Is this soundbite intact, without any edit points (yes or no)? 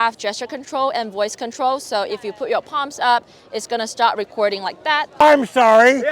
no